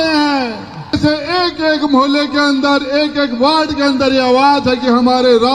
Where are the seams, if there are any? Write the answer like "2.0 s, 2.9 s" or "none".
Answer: 0.9 s